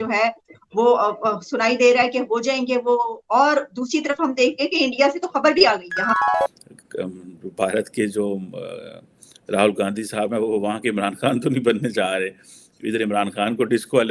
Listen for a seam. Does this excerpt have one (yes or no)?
yes